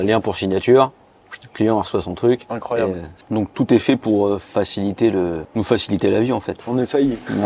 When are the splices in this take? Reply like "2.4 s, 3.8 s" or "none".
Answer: 3.2 s, 5.4 s